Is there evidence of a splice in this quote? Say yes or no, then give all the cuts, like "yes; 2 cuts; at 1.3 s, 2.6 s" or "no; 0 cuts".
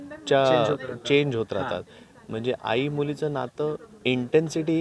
no; 0 cuts